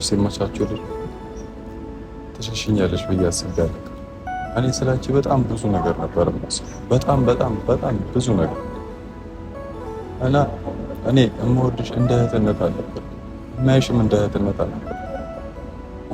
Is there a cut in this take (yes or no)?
no